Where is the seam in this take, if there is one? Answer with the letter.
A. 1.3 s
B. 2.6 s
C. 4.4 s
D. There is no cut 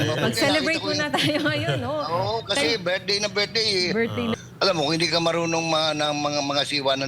C